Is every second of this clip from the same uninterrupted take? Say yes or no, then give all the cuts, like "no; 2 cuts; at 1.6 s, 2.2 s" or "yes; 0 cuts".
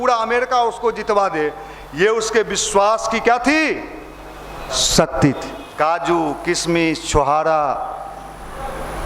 no; 1 cut; at 5.6 s